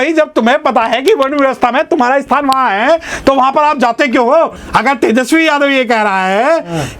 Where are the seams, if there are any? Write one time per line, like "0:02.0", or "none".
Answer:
0:04.6